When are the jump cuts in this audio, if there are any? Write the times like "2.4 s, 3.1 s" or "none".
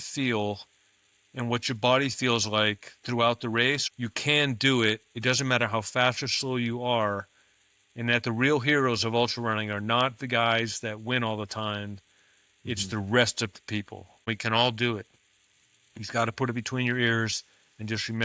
3.8 s, 14.3 s